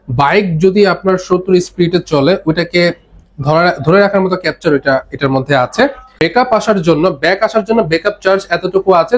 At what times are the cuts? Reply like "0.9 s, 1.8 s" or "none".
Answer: 6.0 s